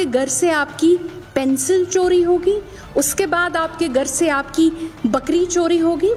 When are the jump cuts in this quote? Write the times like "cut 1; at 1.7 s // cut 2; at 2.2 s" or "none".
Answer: none